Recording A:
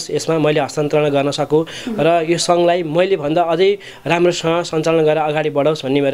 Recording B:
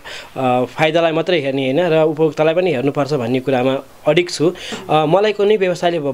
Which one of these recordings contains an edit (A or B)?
B